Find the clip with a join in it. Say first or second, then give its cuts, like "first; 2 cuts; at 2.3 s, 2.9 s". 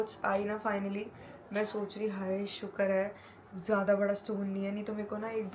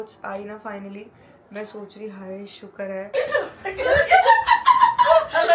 second; 1 cut; at 3.1 s